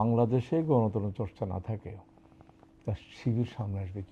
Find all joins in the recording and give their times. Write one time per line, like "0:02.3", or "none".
none